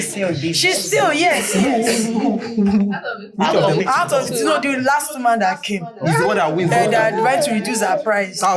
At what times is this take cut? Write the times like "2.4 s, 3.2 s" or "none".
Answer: none

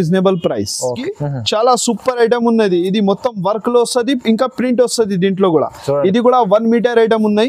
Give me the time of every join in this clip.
1.0 s

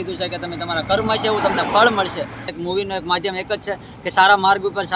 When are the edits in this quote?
2.4 s

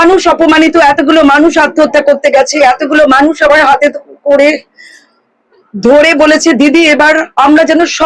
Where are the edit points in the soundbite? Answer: none

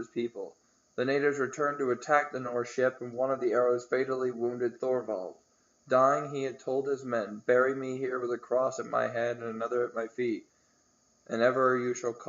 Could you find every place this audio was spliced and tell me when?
4.3 s

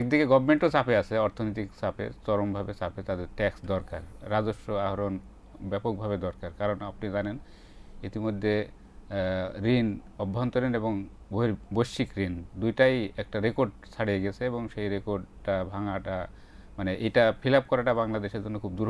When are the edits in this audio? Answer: none

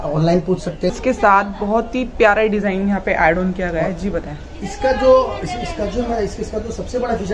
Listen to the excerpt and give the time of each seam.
0.9 s

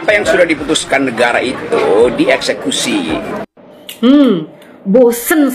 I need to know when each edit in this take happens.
3.5 s

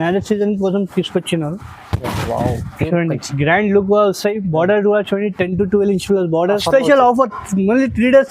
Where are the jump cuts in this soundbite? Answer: 6.5 s

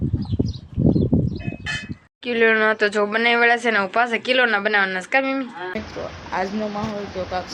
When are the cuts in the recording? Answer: 5.7 s

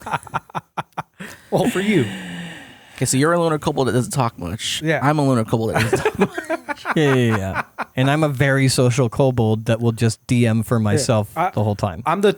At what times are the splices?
none

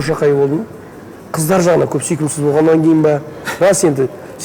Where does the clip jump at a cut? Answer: 1.2 s

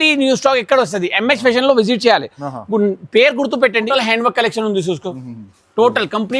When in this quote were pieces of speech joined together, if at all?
3.9 s

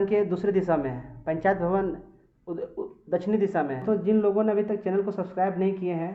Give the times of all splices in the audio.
3.8 s

